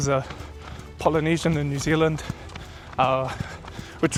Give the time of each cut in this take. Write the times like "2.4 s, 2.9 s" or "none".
none